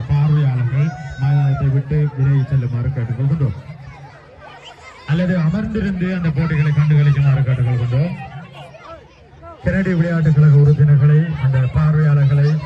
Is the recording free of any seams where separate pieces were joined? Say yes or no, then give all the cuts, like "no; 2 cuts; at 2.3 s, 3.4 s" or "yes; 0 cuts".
yes; 0 cuts